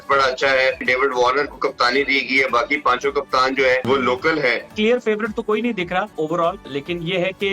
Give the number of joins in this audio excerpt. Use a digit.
4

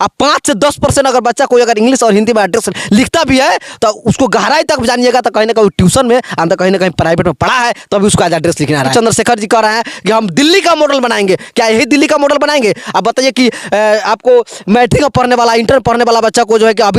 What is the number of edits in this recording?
1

